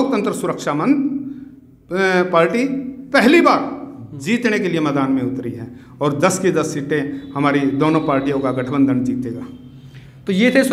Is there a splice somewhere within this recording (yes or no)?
no